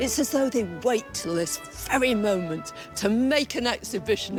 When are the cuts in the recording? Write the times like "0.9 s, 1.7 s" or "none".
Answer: none